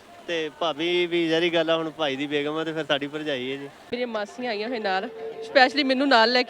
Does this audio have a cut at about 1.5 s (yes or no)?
no